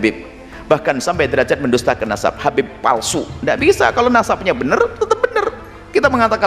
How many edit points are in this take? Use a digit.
0